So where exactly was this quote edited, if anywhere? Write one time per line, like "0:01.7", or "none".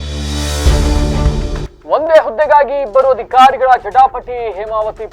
0:01.6